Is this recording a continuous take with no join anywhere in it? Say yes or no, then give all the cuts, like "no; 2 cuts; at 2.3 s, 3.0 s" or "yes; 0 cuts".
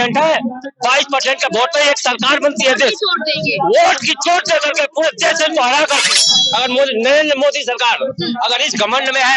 no; 1 cut; at 6.4 s